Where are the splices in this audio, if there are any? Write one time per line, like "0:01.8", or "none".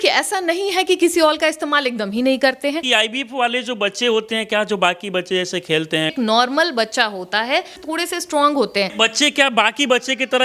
0:02.8
0:06.1
0:07.8
0:08.9